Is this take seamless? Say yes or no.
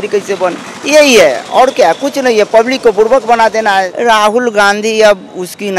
no